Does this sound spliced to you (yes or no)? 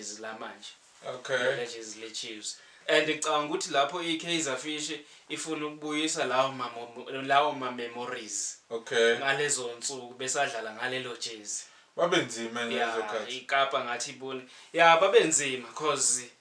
yes